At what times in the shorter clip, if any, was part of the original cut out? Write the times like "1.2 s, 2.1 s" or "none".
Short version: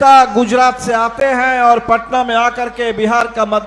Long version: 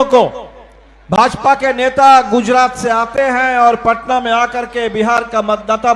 none